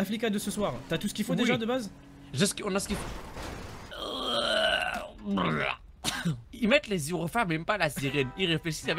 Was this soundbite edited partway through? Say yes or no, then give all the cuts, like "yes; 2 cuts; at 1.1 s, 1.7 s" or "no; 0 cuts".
yes; 2 cuts; at 3.7 s, 6.5 s